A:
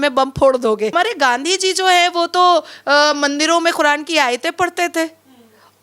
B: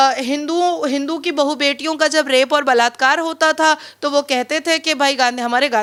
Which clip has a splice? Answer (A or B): A